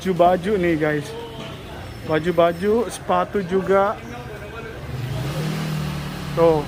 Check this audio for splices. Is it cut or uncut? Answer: uncut